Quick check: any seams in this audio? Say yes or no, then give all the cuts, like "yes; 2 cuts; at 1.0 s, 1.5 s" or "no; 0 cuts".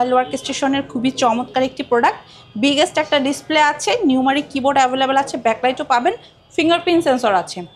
no; 0 cuts